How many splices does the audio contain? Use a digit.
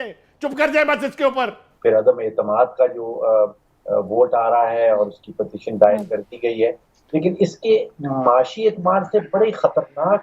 1